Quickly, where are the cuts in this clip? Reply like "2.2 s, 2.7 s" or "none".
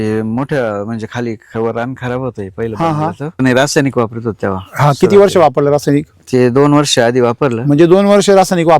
3.4 s

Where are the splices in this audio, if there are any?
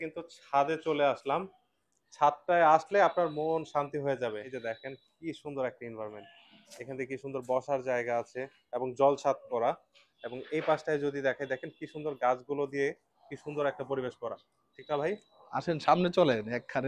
none

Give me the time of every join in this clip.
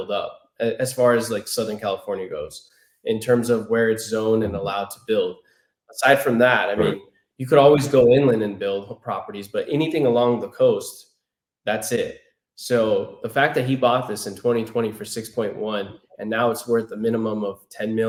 none

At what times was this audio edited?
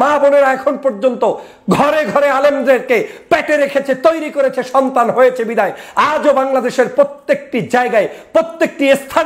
none

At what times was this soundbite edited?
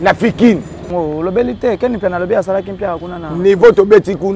0.9 s

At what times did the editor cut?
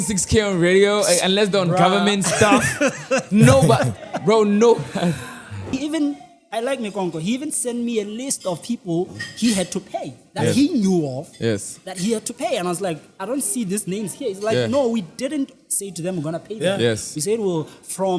5.7 s

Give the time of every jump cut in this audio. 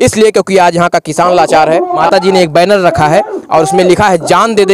2.0 s

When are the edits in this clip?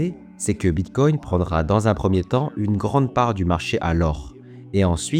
none

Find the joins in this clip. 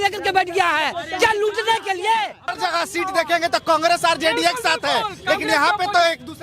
2.5 s

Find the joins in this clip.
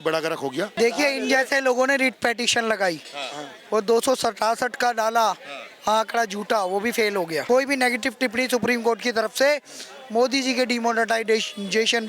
0.7 s, 7.4 s

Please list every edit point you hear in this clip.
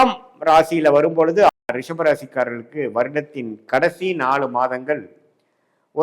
1.5 s

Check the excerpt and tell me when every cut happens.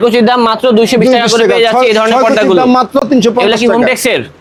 none

